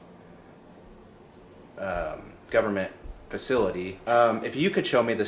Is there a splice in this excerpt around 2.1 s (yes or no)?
no